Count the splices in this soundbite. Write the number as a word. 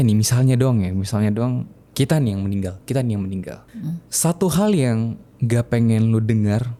zero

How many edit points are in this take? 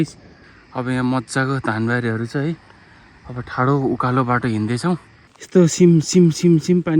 one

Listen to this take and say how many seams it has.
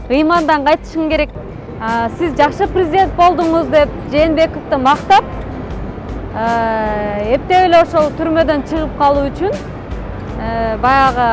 one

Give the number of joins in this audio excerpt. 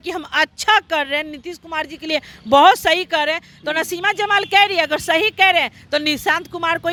zero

